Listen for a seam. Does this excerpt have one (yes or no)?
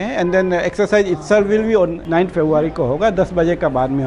yes